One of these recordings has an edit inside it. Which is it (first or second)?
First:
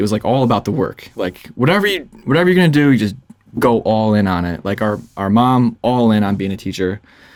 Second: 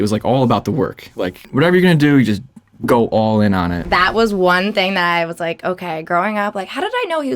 second